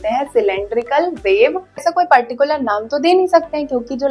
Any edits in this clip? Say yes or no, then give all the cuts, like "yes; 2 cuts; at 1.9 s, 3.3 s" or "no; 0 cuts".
yes; 1 cut; at 1.8 s